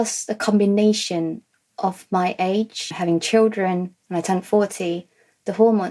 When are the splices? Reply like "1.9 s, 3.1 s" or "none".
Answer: 2.9 s